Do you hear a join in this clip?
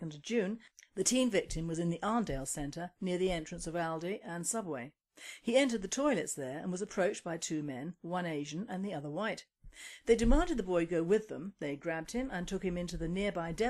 yes; 1 cut; at 3.3 s

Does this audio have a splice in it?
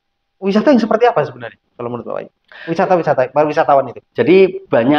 no; 0 cuts

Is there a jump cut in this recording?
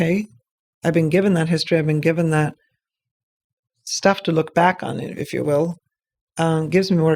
no; 0 cuts

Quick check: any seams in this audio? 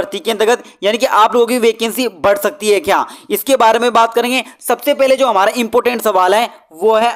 no; 0 cuts

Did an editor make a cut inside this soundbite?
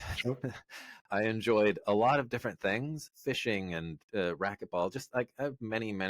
yes; 1 cut; at 3.1 s

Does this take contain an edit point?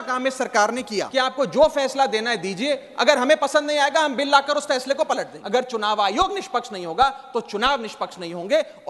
yes; 2 cuts; at 1.1 s, 5.3 s

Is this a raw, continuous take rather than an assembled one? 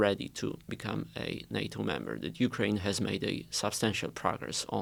yes; 0 cuts

